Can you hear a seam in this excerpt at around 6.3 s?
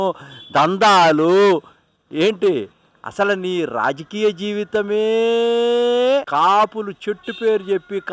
yes; 1 cut; at 6.3 s

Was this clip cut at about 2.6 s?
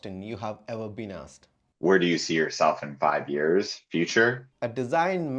no; 2 cuts; at 1.4 s, 4.5 s

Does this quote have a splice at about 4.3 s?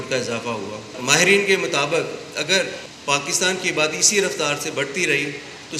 no; 2 cuts; at 0.9 s, 2.9 s

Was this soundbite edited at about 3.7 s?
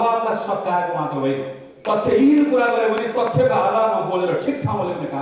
no; 1 cut; at 1.6 s

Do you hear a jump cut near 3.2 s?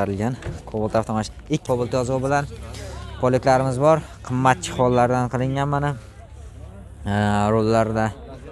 no; 1 cut; at 1.6 s

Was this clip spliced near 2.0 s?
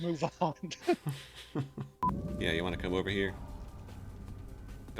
yes; 1 cut; at 2.0 s

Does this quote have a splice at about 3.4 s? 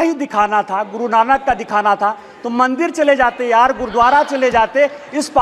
no; 0 cuts

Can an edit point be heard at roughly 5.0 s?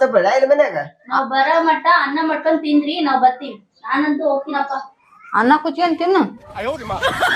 no; 1 cut; at 6.5 s

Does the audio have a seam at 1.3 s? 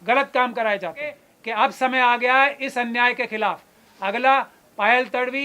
yes; 1 cut; at 1.3 s

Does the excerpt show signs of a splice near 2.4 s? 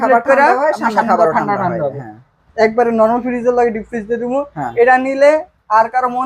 yes; 1 cut; at 2.4 s

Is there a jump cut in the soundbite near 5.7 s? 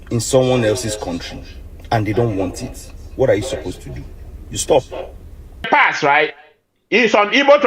yes; 1 cut; at 5.7 s

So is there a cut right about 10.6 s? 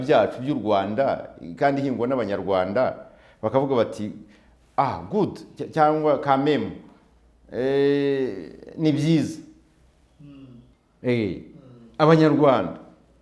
yes; 1 cut; at 10.6 s

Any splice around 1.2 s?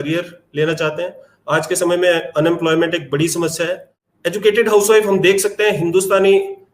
no; 1 cut; at 3.9 s

